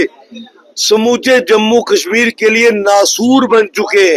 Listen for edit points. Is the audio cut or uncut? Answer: uncut